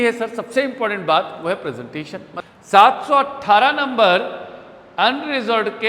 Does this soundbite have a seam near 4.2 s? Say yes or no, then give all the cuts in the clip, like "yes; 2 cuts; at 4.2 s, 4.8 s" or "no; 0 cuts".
no; 1 cut; at 2.3 s